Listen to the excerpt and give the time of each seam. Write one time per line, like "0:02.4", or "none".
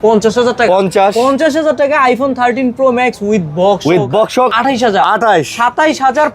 0:04.5